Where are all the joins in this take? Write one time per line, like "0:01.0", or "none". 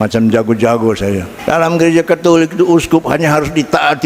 0:01.3